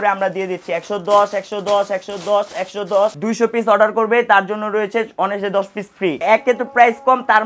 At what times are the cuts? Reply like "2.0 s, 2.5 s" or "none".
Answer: 3.2 s, 6.2 s